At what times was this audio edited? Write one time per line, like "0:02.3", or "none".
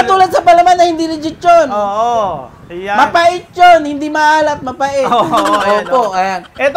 none